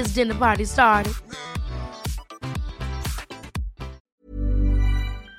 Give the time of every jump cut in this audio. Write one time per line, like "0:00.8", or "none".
0:04.1